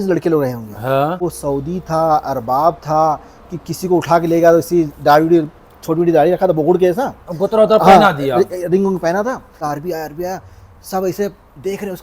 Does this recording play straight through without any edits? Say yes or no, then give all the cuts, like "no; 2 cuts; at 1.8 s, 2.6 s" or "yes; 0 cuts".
no; 2 cuts; at 1.2 s, 9.5 s